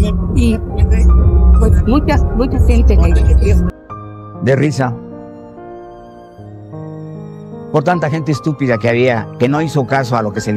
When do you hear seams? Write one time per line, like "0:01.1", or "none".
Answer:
none